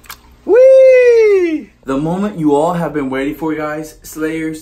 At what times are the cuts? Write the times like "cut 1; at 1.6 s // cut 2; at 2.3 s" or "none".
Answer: cut 1; at 1.8 s

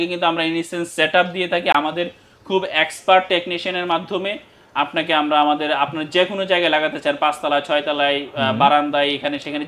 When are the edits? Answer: none

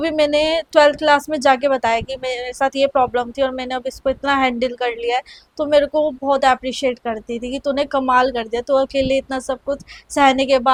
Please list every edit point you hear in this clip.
none

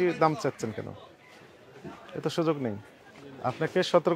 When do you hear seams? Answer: none

